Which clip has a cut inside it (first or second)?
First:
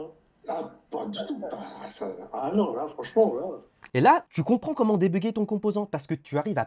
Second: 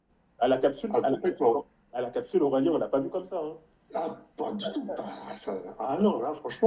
first